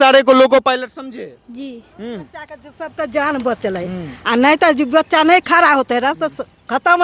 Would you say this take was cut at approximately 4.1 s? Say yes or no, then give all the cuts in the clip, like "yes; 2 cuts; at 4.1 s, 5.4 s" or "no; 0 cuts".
no; 1 cut; at 2.2 s